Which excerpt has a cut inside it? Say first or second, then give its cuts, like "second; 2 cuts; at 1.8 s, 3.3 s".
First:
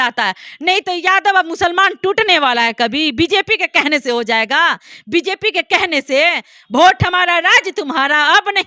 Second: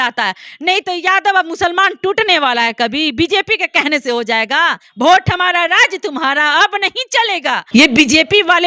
second; 2 cuts; at 4.8 s, 7.6 s